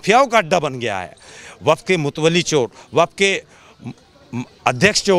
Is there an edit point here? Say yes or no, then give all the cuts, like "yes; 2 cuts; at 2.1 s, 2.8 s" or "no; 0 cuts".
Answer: no; 0 cuts